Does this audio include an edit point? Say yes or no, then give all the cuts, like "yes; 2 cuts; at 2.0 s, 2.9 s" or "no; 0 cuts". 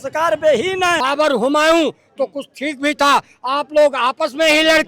yes; 1 cut; at 1.0 s